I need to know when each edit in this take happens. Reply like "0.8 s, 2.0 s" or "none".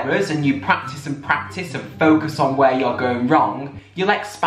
none